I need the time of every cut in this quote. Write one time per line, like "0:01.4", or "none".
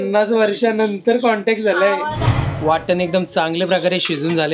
0:02.2